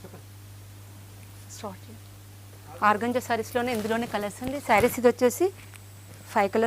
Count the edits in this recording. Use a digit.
0